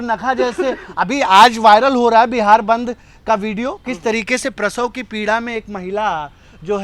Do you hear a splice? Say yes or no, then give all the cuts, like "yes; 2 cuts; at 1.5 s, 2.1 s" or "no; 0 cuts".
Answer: no; 0 cuts